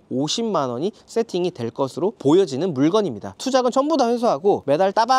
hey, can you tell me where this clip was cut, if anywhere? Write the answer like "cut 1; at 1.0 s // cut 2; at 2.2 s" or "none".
cut 1; at 3.3 s